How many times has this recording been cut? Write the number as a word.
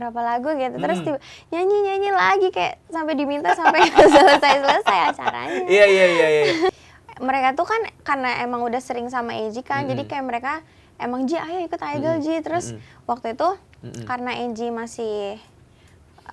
one